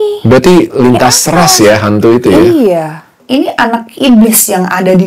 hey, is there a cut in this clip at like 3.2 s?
yes; 1 cut; at 3.2 s

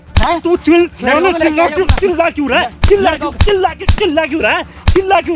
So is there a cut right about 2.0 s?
no; 0 cuts

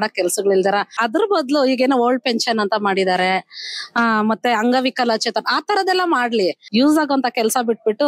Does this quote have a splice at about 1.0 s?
yes; 2 cuts; at 1.0 s, 6.6 s

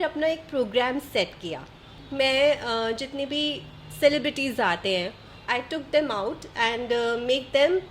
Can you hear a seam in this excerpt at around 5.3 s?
yes; 2 cuts; at 2.0 s, 5.3 s

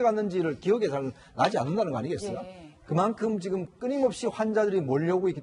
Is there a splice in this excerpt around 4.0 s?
yes; 1 cut; at 4.0 s

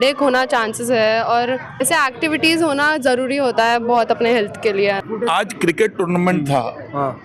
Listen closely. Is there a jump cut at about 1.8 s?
no; 0 cuts

